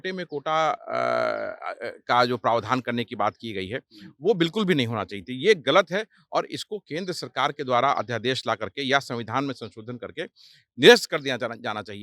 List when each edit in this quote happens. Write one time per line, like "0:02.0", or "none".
none